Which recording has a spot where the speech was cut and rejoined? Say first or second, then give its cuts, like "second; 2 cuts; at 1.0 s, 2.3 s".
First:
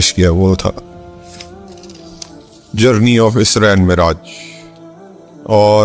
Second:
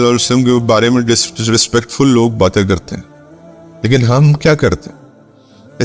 first; 2 cuts; at 0.8 s, 2.7 s